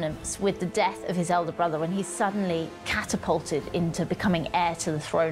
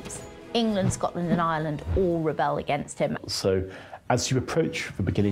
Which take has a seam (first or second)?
second